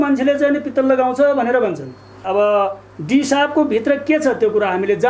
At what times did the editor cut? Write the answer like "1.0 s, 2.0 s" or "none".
2.2 s